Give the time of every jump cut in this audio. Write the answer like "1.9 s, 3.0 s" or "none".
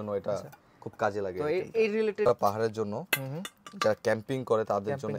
2.3 s